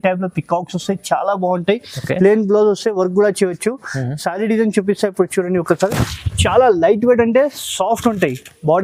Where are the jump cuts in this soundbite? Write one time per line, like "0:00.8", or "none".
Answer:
none